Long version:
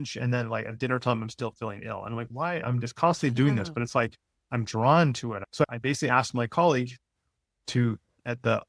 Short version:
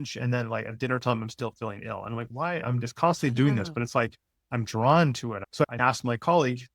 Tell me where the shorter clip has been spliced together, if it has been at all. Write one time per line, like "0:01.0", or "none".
0:05.8

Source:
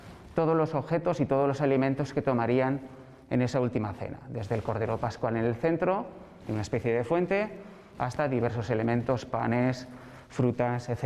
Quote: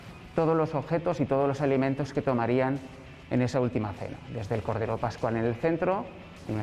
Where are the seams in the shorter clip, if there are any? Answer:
none

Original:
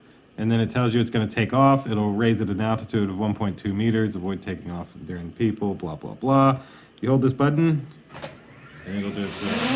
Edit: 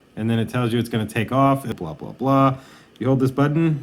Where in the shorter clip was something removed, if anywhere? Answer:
0:01.7

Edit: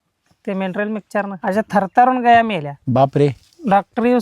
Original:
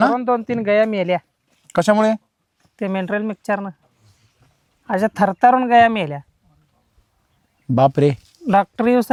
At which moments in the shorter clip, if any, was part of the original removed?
0:01.4
0:02.7

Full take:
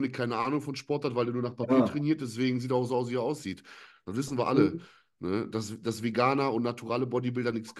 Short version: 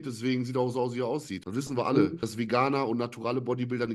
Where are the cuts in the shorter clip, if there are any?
0:01.4
0:02.2

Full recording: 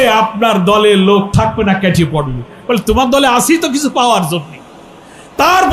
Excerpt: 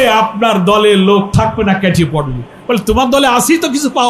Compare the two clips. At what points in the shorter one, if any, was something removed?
none

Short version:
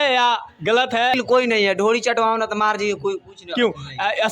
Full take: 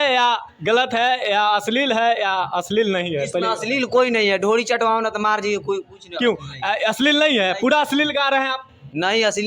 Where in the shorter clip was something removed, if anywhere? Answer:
0:01.2

